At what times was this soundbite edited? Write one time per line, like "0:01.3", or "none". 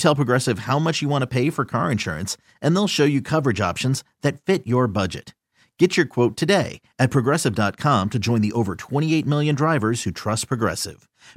none